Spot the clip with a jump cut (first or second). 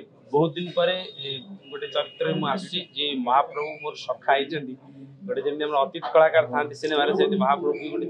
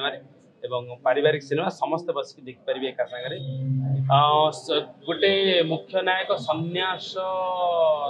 second